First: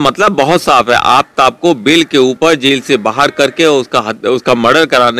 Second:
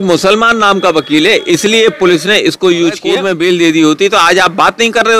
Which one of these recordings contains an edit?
second; 1 cut; at 3.2 s

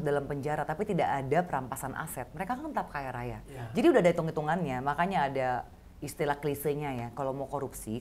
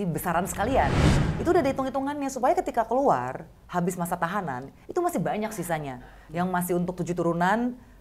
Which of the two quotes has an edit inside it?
second; 1 cut; at 1.2 s

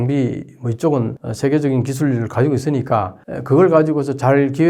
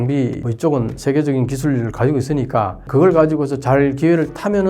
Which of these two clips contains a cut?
second; 2 cuts; at 0.8 s, 2.8 s

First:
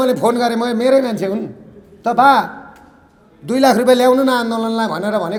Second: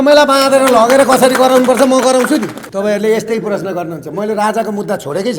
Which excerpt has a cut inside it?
second; 1 cut; at 2.6 s

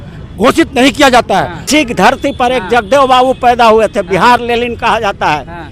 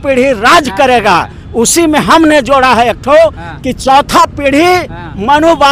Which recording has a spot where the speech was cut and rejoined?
first; 1 cut; at 1.6 s

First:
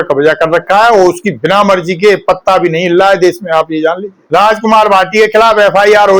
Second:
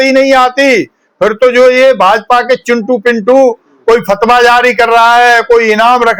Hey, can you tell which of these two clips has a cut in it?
first; 1 cut; at 4.1 s

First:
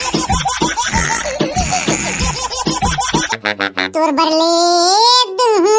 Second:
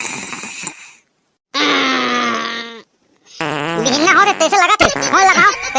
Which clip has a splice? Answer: first; 1 cut; at 3.3 s

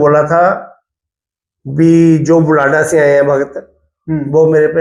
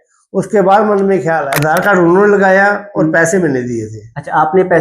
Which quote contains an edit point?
second; 1 cut; at 1.5 s

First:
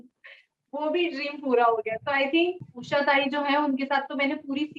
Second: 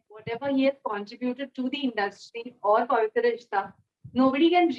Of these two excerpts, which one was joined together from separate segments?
first; 1 cut; at 2.7 s

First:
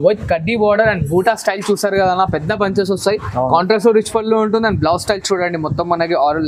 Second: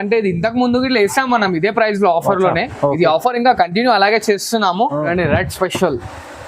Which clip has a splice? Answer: second; 1 cut; at 5.1 s

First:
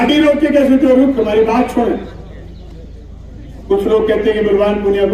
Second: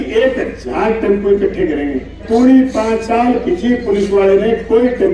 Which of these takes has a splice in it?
second; 1 cut; at 2.2 s

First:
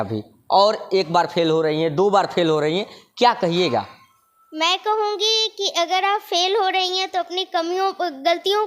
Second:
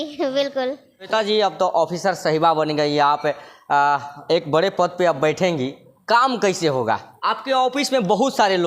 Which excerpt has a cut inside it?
second; 2 cuts; at 1.1 s, 7.1 s

